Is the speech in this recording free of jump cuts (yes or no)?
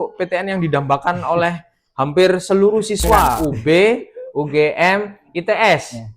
no